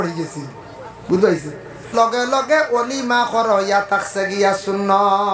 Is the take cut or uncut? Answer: cut